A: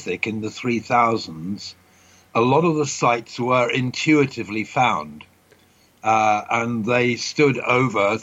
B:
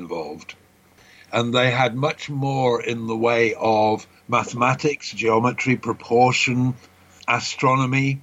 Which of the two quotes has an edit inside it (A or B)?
B